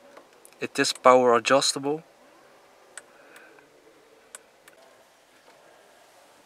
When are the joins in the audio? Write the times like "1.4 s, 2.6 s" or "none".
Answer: 4.8 s